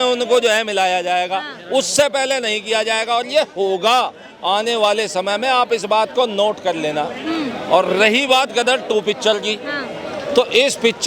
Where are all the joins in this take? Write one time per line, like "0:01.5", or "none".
none